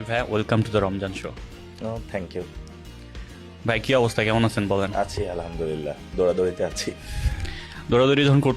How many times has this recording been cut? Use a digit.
0